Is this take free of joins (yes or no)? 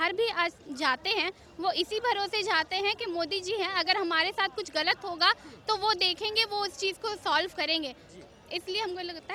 yes